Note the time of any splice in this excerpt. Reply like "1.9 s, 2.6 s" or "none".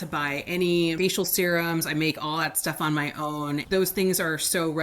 1.0 s, 3.6 s